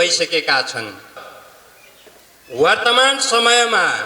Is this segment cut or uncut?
cut